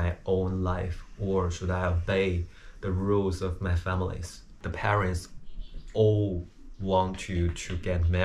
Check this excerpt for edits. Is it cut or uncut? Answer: cut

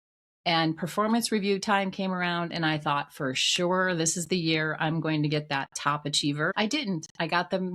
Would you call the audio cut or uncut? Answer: cut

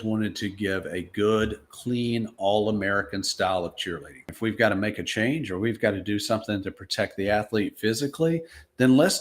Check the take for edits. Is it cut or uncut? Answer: cut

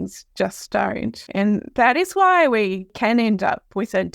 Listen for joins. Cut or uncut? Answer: cut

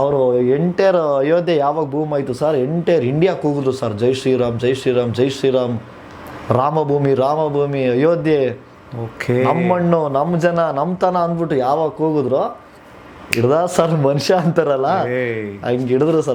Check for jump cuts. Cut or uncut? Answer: uncut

